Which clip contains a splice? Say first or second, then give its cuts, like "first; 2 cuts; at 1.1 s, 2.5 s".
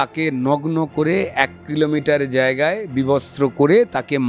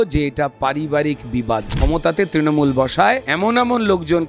second; 2 cuts; at 1.8 s, 3.3 s